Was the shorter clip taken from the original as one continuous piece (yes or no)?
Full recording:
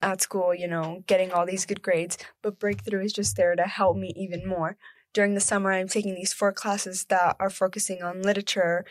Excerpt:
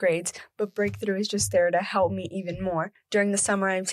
no